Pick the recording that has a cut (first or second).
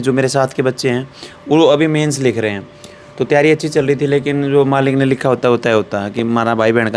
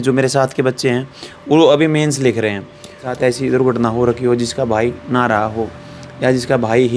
second